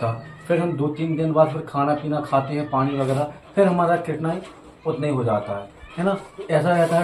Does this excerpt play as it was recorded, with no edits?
yes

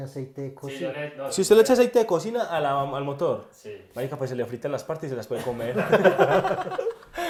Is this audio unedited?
yes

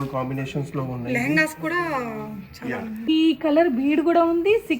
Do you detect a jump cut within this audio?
yes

